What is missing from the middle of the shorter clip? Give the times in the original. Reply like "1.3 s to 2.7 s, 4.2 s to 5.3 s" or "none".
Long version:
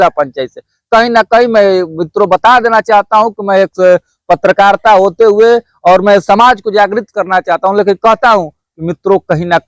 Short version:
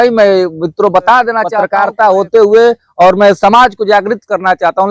3.0 s to 4.5 s